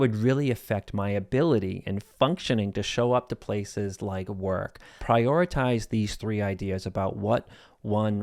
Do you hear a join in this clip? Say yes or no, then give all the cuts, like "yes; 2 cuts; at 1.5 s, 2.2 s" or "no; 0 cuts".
yes; 1 cut; at 4.9 s